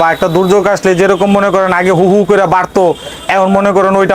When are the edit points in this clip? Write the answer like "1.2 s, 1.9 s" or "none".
none